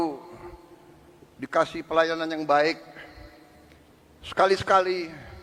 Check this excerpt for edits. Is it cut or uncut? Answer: uncut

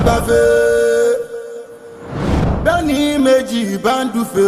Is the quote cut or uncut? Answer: uncut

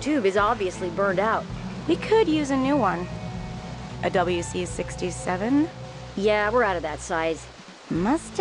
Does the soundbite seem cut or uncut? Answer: uncut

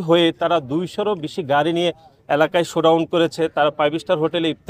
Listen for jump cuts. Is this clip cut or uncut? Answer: uncut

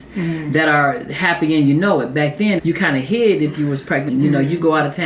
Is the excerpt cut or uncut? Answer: cut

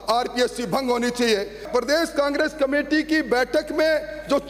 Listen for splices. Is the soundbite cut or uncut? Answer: cut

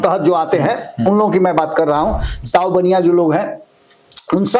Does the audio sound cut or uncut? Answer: uncut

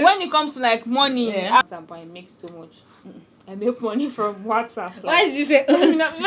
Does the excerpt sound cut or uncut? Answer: cut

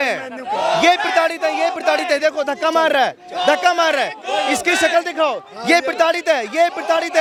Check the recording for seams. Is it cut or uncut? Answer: uncut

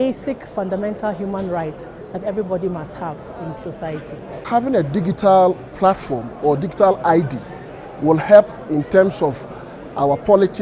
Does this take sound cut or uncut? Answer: cut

